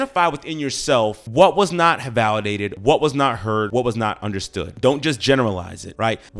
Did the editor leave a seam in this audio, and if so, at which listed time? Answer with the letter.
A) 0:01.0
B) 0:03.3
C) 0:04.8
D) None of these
D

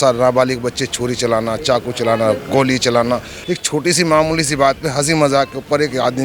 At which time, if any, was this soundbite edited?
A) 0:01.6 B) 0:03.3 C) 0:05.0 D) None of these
B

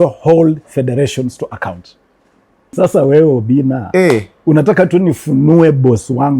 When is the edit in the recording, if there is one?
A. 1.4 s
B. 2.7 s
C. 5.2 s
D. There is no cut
B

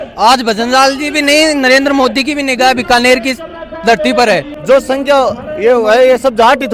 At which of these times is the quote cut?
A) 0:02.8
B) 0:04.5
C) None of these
B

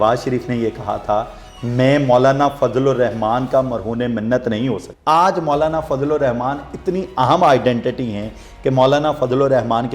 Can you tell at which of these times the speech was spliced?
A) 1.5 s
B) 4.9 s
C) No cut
B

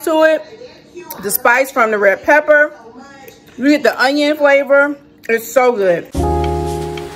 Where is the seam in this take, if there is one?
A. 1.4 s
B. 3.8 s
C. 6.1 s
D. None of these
C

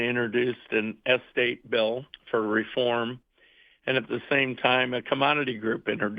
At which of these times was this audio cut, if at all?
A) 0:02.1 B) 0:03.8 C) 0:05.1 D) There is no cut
A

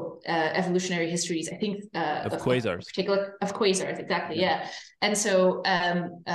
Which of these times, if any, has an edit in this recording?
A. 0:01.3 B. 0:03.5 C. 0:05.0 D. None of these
D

